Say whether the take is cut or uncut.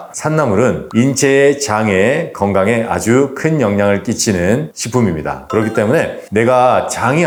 uncut